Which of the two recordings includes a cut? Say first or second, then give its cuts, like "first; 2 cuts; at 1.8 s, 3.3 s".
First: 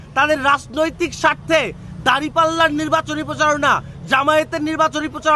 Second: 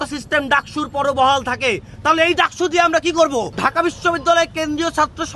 second; 1 cut; at 3.5 s